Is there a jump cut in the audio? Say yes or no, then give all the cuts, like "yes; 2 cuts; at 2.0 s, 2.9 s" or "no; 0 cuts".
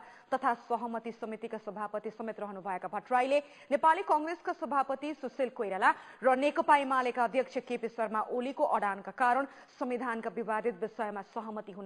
yes; 1 cut; at 7.3 s